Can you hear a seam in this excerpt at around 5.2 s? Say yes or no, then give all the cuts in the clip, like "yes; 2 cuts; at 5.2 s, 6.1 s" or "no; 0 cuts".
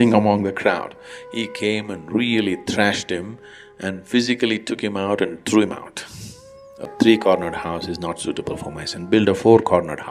no; 1 cut; at 6.9 s